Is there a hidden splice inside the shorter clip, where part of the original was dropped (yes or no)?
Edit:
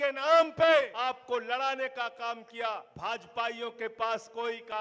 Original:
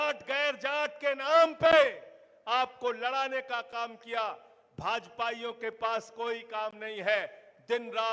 yes